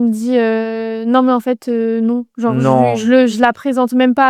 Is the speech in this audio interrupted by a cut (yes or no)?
no